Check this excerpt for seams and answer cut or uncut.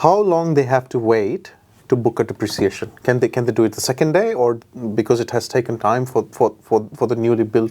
uncut